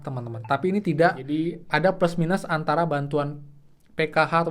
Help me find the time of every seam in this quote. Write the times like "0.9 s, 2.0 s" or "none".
1.2 s